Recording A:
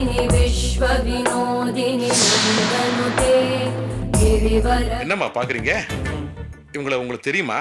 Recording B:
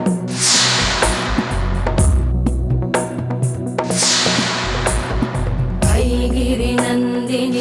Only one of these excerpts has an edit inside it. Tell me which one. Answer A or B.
A